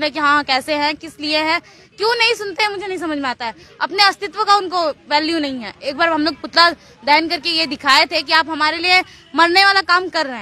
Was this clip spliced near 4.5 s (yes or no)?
no